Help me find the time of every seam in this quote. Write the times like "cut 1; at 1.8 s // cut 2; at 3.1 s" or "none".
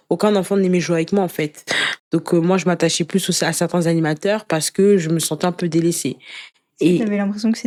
none